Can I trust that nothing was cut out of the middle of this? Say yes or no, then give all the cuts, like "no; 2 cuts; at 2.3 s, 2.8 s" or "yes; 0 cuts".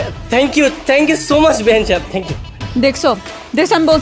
yes; 0 cuts